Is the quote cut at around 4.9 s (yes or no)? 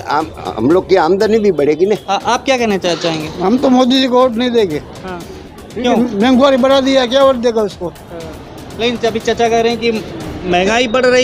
no